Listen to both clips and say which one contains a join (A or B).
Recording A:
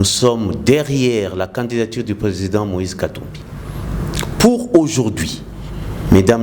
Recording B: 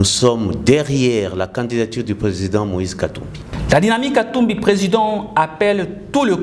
B